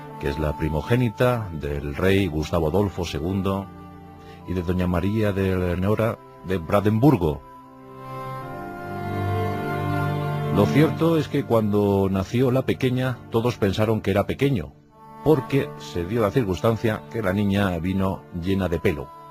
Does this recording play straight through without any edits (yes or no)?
yes